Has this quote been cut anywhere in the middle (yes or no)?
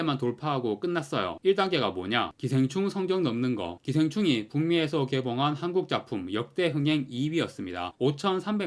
no